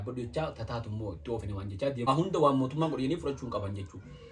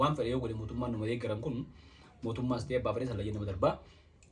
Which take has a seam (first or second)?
first